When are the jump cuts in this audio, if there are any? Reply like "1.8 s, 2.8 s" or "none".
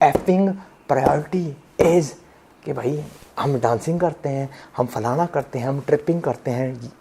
none